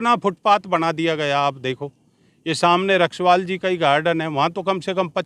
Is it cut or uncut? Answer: uncut